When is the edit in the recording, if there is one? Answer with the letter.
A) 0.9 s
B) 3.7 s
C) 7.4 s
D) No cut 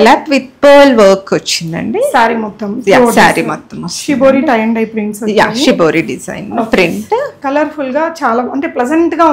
C